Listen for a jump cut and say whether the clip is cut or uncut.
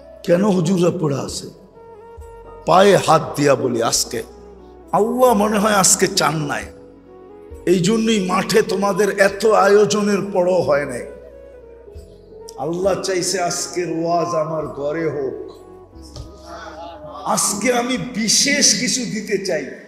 cut